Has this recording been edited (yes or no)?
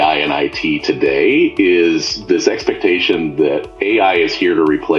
no